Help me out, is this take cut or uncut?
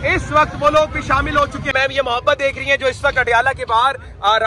cut